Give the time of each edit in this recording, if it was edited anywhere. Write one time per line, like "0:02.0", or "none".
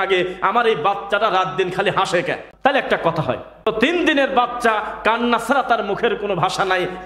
0:02.4
0:03.7